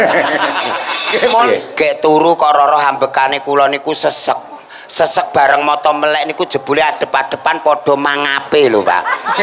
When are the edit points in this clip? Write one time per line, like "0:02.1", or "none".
0:01.5